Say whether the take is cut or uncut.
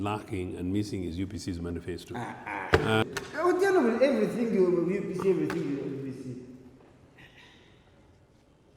cut